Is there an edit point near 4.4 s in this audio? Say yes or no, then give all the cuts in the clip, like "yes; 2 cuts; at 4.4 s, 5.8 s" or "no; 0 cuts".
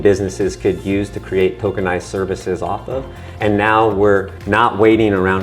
yes; 1 cut; at 4.4 s